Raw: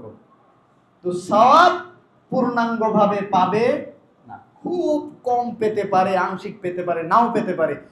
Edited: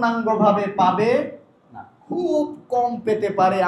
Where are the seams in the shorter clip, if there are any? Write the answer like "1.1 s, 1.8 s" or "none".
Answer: none